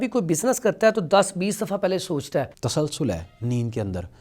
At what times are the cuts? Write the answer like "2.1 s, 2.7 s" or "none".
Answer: 2.6 s